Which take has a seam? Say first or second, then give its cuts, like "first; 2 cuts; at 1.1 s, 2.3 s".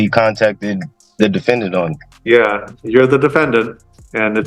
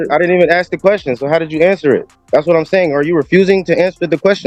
first; 2 cuts; at 1.0 s, 2.1 s